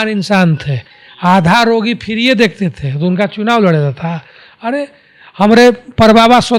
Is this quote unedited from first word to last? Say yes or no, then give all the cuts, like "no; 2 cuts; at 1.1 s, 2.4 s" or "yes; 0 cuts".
yes; 0 cuts